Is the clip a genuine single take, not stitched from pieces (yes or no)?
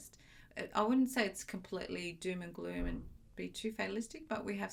yes